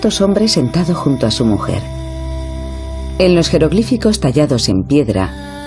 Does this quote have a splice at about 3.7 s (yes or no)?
yes